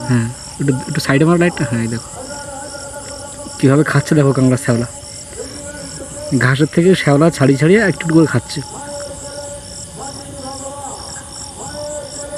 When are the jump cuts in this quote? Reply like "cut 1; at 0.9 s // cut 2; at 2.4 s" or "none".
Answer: none